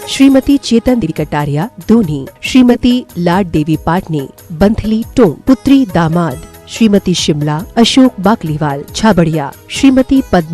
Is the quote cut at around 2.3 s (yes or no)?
no